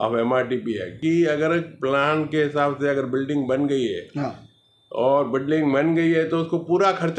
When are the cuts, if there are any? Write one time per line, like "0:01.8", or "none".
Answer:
0:01.0